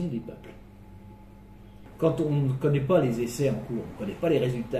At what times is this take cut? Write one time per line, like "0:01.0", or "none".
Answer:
0:01.8